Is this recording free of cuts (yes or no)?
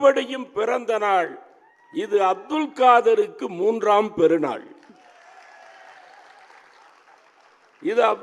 yes